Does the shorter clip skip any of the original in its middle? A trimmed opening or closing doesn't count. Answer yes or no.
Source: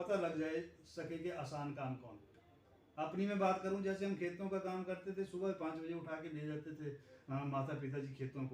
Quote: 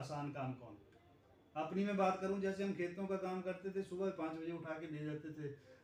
no